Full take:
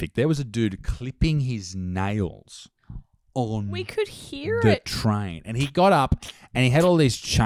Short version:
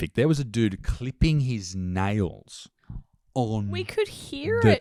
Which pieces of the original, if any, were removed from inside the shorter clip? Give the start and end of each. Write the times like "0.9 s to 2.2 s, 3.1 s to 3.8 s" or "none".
none